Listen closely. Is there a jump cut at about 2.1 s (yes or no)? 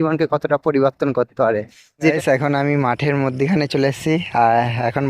yes